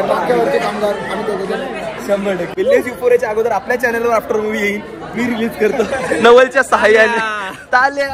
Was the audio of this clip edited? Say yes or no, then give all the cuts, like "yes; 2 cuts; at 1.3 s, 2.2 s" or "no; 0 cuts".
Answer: yes; 1 cut; at 2.5 s